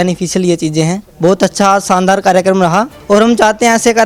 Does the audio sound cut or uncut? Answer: cut